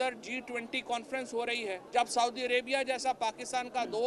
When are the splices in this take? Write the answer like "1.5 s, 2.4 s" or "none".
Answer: 1.8 s